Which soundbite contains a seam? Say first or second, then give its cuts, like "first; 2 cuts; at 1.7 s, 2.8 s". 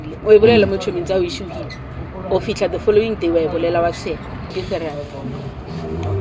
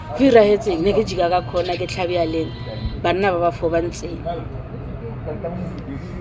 first; 1 cut; at 4.6 s